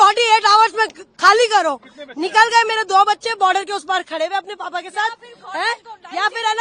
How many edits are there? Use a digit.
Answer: 0